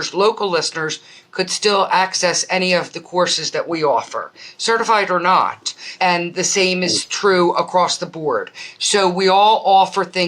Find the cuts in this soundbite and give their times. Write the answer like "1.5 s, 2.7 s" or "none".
5.9 s